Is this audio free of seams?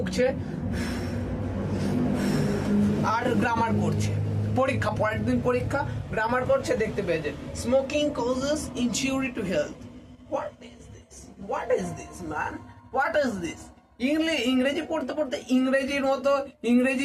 yes; 0 cuts

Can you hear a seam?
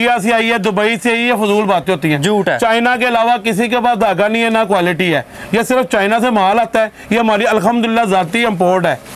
no; 0 cuts

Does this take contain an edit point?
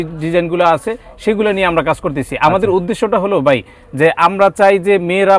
no; 0 cuts

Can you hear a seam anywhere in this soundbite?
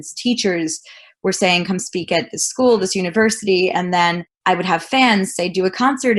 no; 0 cuts

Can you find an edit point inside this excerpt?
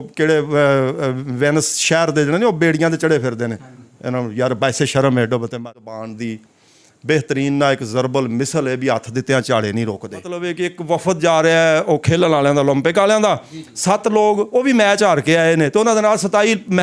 yes; 2 cuts; at 5.7 s, 10.5 s

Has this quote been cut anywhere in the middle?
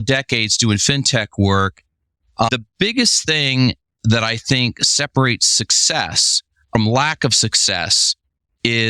yes; 2 cuts; at 2.5 s, 6.7 s

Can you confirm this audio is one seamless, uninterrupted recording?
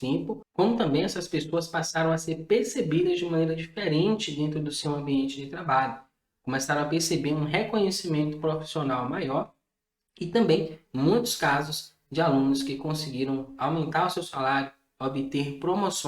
yes; 0 cuts

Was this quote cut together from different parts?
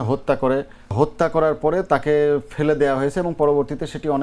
yes; 1 cut; at 0.9 s

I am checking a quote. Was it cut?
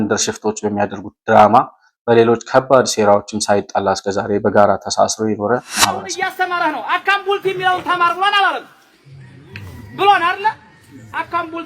yes; 1 cut; at 6.1 s

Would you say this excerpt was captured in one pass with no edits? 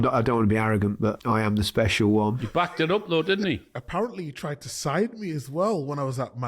no; 3 cuts; at 1.2 s, 2.4 s, 3.7 s

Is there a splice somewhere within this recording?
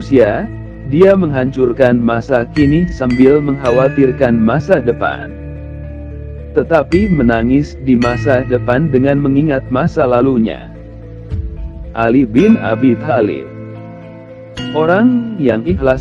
yes; 2 cuts; at 5.2 s, 6.5 s

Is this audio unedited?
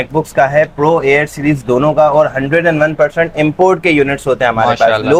yes; 0 cuts

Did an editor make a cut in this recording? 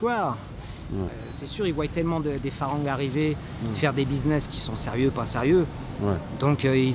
yes; 1 cut; at 1.2 s

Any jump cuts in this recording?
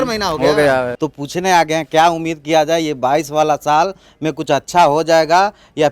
yes; 1 cut; at 0.9 s

